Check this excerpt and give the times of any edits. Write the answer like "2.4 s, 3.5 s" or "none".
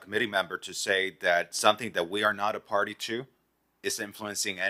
none